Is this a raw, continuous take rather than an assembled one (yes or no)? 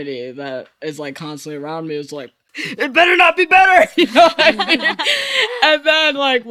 no